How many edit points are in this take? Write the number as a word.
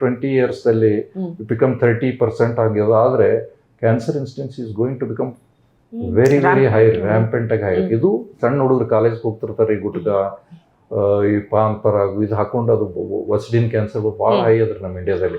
one